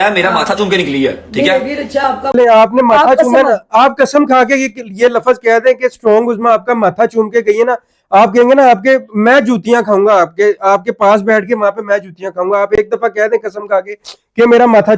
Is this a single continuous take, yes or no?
yes